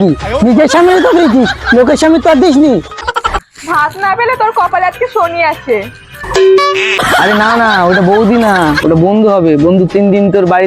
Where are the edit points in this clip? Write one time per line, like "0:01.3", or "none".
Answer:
0:03.1
0:07.0